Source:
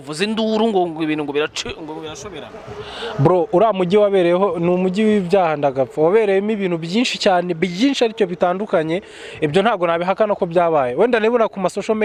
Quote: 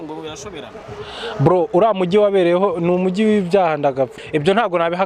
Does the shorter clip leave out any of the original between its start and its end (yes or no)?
yes